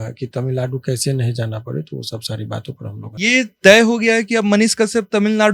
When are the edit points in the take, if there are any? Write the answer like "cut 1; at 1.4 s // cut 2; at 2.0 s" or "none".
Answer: cut 1; at 3.2 s